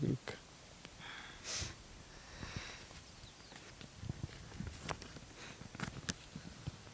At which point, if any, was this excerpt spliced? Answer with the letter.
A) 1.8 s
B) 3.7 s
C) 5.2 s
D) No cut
B